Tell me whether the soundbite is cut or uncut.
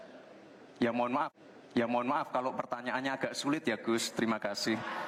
uncut